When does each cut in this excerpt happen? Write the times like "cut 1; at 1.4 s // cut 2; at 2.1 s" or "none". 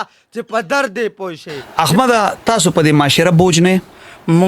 cut 1; at 1.6 s